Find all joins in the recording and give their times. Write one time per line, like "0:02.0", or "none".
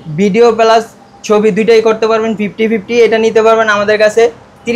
none